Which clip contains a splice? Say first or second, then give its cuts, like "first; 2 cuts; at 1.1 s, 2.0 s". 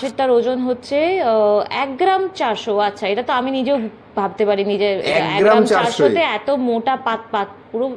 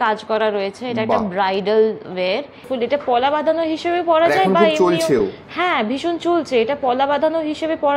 second; 1 cut; at 2.7 s